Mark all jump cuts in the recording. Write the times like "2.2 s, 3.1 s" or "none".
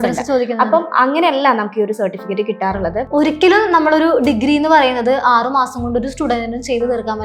3.1 s